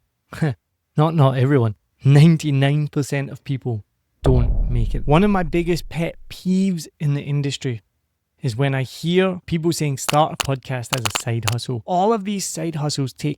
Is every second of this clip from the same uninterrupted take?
no; 3 cuts; at 4.9 s, 9.5 s, 11.8 s

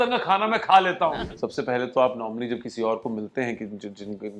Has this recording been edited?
yes; 1 cut; at 1.2 s

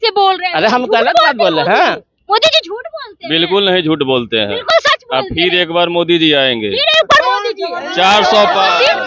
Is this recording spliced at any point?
no; 0 cuts

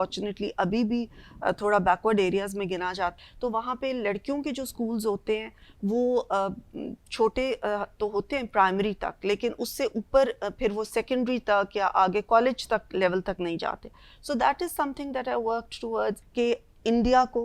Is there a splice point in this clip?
yes; 2 cuts; at 3.2 s, 16.2 s

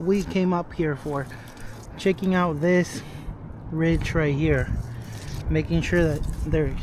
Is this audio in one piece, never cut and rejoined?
yes; 0 cuts

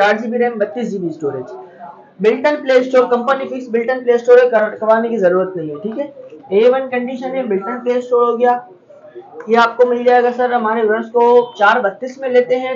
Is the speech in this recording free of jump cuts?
yes; 0 cuts

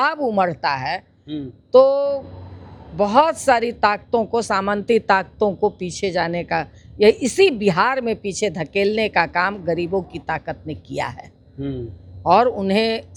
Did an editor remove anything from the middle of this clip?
no; 0 cuts

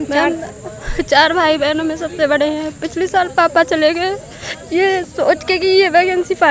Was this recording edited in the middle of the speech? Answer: no; 0 cuts

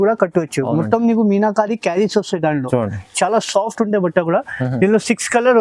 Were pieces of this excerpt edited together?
no; 0 cuts

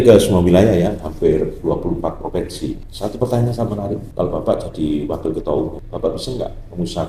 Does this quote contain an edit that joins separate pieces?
yes; 3 cuts; at 2.9 s, 4.1 s, 5.8 s

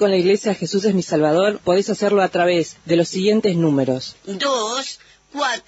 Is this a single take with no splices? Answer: yes; 0 cuts

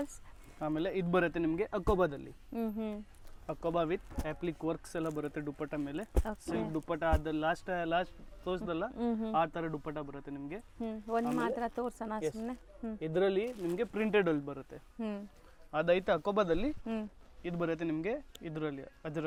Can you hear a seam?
no; 0 cuts

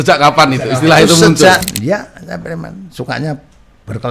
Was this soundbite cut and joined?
yes; 1 cut; at 1.6 s

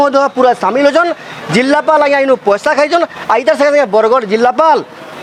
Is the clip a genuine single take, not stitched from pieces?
yes; 0 cuts

